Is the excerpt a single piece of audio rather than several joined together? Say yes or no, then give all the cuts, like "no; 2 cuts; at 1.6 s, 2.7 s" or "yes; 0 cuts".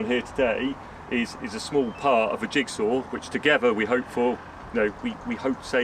yes; 0 cuts